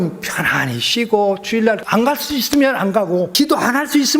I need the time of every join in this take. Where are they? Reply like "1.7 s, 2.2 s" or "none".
1.8 s, 3.3 s